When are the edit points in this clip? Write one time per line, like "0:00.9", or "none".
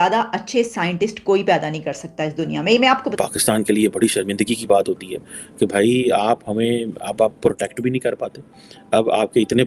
0:03.1